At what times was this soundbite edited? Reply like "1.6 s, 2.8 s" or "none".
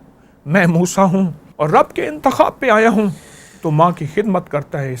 1.4 s